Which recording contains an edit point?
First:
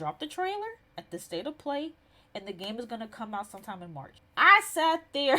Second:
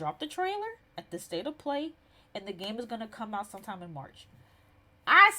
first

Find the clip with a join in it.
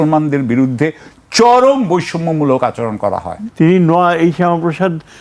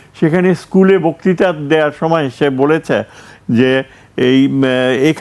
first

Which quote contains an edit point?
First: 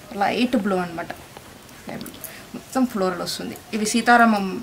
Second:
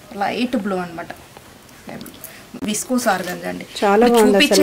second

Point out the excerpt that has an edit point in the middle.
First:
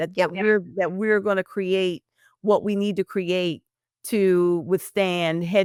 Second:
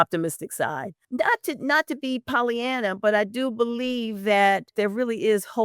second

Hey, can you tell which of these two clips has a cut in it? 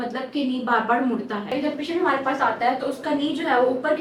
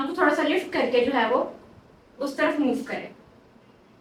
first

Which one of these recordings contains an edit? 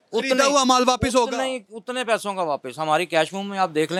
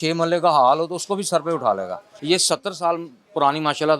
second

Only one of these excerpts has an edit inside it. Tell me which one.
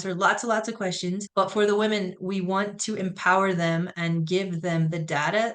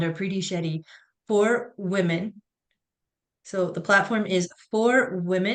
first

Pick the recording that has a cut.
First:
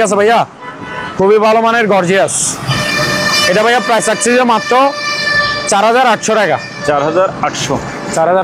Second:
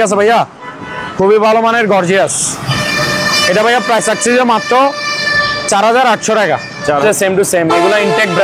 second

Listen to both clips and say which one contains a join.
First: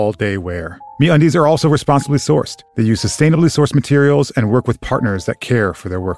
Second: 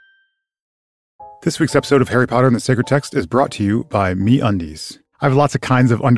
second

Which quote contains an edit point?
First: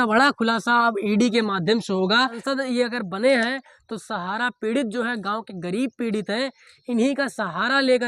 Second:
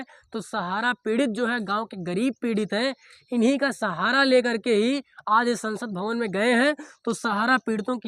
first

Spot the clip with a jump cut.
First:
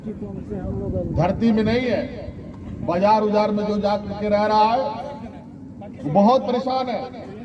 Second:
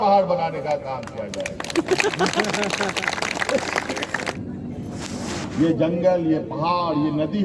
second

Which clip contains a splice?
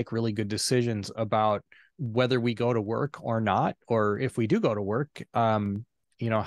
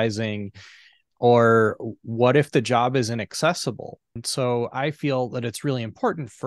second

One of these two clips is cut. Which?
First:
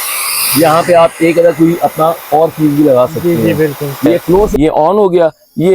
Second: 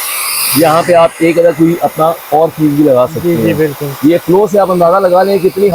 first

